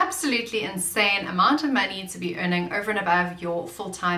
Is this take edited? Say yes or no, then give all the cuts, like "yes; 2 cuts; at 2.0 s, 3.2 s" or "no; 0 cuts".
no; 0 cuts